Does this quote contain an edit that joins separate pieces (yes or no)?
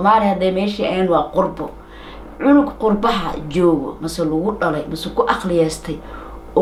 no